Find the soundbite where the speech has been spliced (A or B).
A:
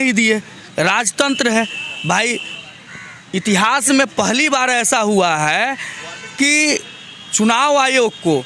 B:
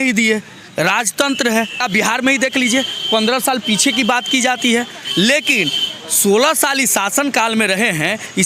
B